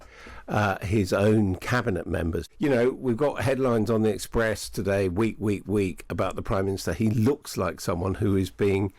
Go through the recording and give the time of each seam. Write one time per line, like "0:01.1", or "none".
0:02.4